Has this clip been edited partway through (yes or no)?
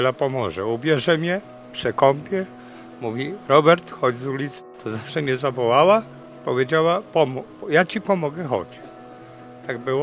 yes